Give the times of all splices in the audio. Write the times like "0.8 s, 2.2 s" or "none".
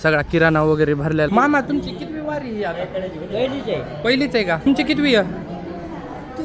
1.3 s, 4.7 s